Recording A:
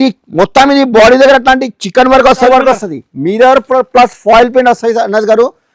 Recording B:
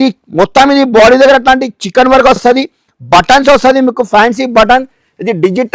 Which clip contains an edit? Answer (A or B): A